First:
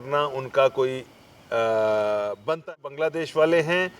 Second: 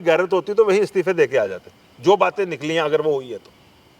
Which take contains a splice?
first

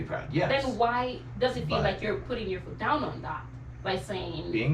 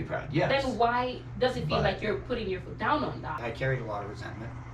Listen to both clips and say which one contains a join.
second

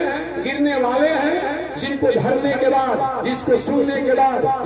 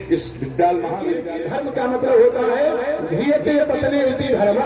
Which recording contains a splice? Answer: second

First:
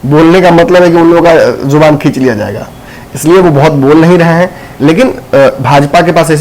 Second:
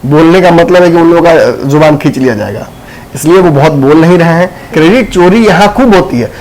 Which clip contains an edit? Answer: second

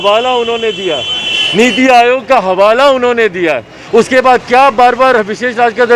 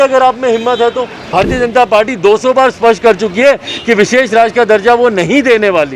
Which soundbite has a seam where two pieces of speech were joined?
second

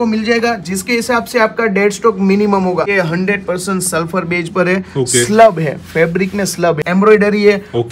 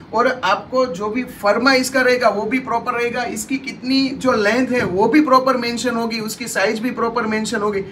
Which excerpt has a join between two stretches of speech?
first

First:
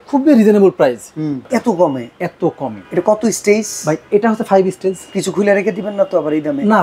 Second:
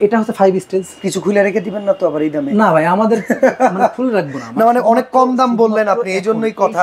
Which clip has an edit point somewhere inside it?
first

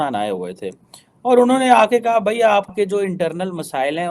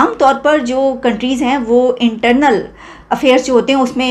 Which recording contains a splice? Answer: first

